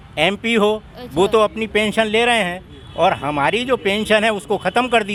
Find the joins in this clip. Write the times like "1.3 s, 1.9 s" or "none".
none